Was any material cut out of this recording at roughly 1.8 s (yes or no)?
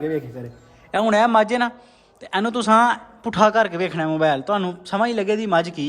no